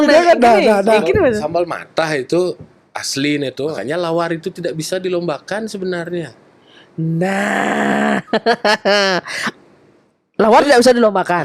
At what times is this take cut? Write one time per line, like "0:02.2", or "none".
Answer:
0:03.8